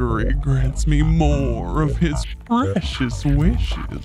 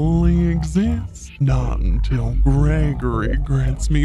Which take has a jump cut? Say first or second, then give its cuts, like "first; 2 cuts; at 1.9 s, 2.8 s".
second; 1 cut; at 1.2 s